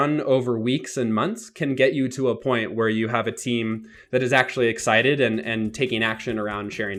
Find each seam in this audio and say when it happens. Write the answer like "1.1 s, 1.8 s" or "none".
none